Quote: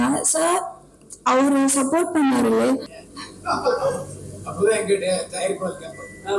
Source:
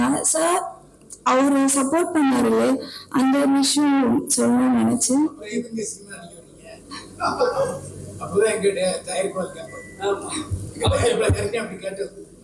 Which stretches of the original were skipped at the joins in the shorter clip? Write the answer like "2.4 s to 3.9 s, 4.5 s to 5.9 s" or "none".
3.0 s to 6.7 s